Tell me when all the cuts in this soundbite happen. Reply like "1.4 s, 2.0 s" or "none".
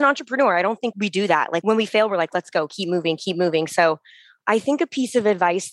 1.3 s